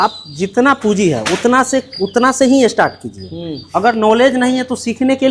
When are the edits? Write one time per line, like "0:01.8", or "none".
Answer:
none